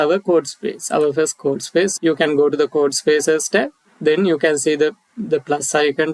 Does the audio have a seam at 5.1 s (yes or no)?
no